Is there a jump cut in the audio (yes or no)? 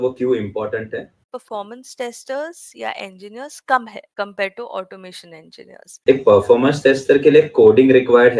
yes